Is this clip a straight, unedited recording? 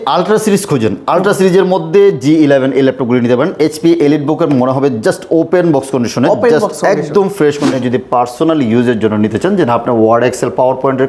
no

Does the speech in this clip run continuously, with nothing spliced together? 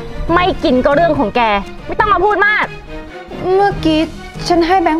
no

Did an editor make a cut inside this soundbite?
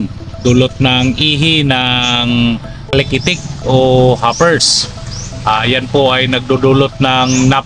yes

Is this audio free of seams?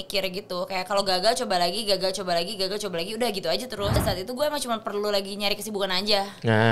no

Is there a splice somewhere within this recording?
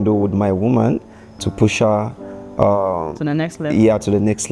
no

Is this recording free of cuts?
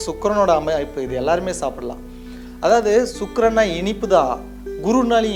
yes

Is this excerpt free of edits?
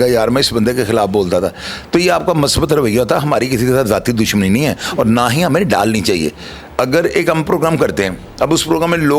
yes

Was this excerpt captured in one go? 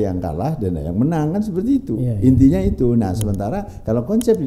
yes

